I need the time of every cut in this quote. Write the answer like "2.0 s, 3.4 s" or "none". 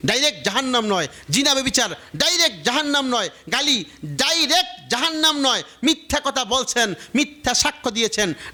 none